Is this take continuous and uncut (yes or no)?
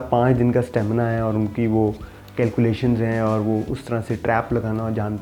yes